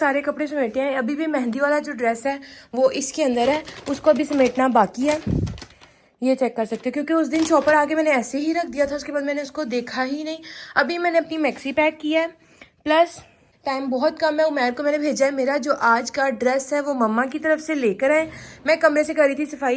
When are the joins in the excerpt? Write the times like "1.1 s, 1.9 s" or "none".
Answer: none